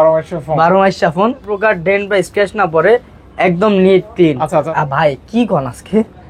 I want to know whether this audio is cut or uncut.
cut